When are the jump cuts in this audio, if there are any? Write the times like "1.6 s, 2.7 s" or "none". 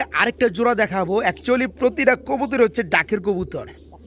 none